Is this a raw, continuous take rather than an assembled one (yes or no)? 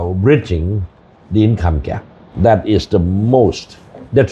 no